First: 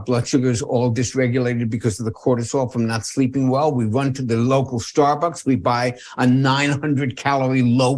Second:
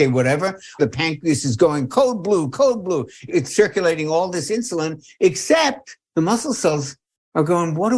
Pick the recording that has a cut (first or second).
second